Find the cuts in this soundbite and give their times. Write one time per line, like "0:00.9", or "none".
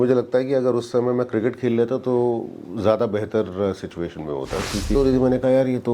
0:04.9